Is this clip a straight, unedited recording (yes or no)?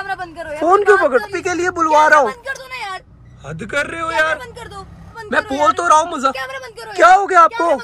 no